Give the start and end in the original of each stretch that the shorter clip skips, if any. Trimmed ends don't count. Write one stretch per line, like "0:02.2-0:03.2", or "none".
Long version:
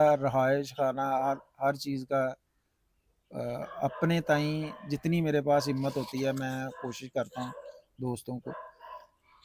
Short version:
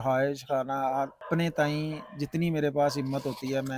0:01.5-0:03.9